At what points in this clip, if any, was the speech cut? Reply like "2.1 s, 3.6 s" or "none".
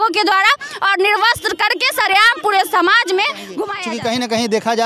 3.7 s